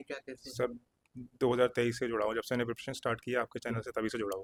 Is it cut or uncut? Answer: uncut